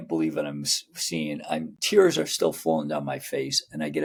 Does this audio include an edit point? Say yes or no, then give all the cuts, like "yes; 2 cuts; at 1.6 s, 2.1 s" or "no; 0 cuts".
no; 0 cuts